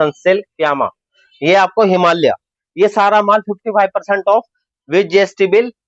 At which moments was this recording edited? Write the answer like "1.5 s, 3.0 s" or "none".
none